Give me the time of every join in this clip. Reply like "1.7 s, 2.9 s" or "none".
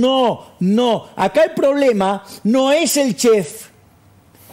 none